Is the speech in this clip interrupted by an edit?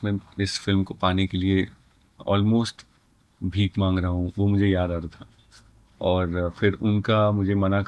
no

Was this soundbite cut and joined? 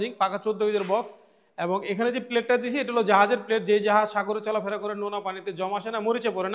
no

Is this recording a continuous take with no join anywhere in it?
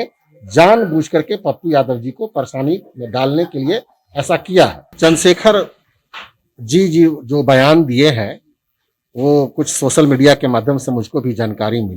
no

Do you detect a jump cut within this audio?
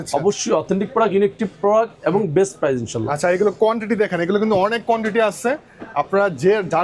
no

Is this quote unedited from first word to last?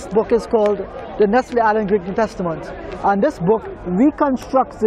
yes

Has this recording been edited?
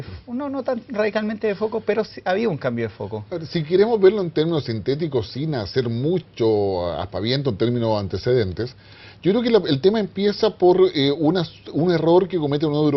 yes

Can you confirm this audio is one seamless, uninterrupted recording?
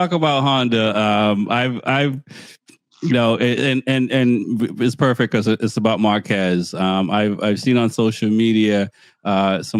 yes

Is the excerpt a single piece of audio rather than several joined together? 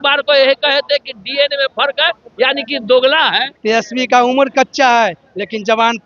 no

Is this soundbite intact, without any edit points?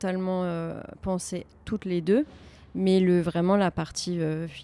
yes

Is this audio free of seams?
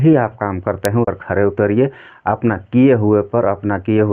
no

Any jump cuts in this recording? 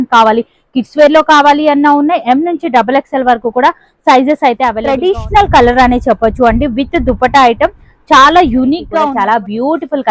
yes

